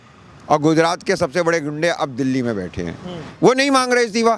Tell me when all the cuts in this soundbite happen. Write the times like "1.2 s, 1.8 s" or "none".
3.3 s